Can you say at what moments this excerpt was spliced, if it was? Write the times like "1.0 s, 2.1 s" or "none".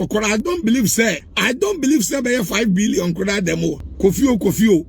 1.3 s, 3.9 s